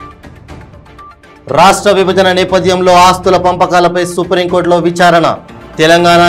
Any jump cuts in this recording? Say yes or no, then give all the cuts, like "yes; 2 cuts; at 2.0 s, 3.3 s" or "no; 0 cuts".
no; 0 cuts